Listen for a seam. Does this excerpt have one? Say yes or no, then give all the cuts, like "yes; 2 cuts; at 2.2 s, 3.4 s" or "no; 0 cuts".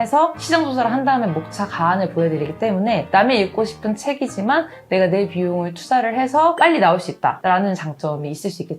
no; 0 cuts